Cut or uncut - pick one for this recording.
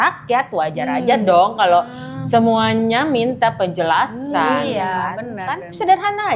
uncut